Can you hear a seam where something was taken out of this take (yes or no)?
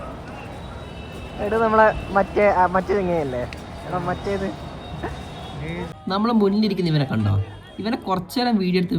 no